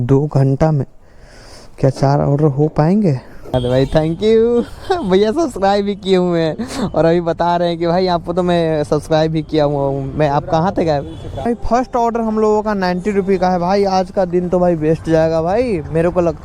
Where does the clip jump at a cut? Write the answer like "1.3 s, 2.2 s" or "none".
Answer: 3.5 s, 11.5 s